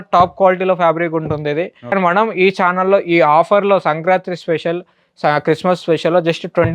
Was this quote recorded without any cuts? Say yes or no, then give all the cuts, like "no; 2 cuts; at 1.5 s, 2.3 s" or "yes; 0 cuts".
no; 1 cut; at 1.9 s